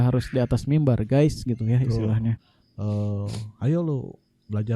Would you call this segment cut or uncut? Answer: cut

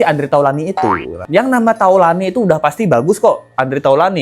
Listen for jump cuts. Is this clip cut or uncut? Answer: cut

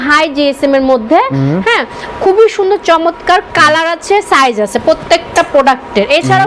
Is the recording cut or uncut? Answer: uncut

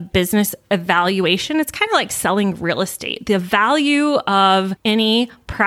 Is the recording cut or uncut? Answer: cut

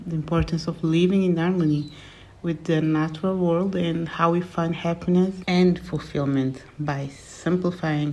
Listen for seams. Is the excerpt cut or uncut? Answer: uncut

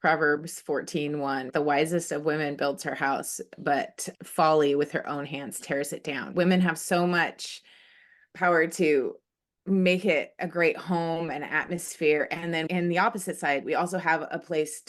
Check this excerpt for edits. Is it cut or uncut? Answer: cut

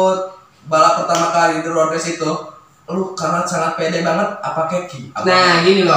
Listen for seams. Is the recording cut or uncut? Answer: uncut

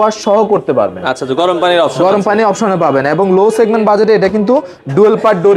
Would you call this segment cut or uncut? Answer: uncut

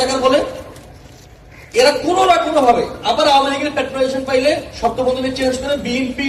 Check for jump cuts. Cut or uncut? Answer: uncut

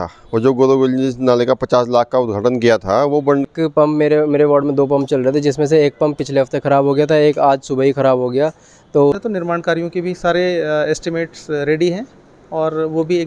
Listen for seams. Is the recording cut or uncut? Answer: cut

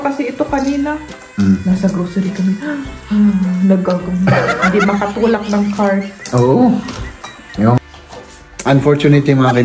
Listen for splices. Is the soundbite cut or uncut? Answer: cut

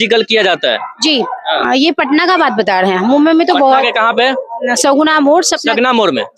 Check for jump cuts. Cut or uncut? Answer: uncut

